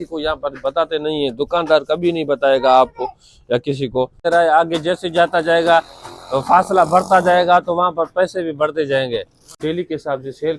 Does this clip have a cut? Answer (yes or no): yes